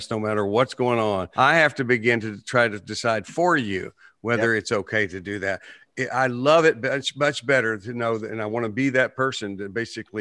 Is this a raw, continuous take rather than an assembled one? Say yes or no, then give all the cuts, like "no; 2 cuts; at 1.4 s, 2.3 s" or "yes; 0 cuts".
yes; 0 cuts